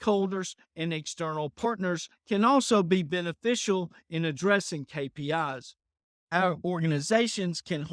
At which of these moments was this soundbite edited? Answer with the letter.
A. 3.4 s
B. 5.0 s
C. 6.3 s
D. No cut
C